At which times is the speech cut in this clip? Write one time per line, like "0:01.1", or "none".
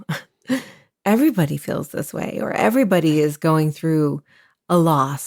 none